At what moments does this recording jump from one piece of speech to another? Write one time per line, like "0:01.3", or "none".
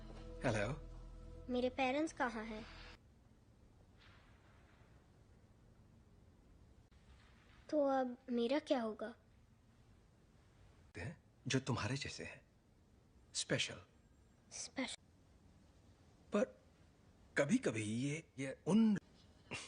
0:03.0